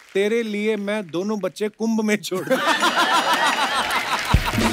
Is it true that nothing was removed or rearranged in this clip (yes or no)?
yes